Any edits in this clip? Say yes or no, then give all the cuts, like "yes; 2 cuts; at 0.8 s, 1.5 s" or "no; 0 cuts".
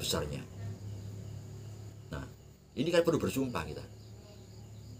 no; 0 cuts